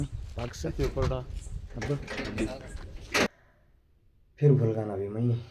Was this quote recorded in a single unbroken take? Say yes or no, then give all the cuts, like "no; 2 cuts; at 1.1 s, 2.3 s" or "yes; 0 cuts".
no; 1 cut; at 3.3 s